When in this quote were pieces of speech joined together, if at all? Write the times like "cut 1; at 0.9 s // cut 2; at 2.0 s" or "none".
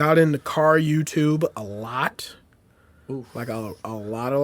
none